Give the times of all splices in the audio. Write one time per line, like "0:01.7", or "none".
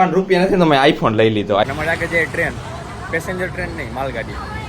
0:01.6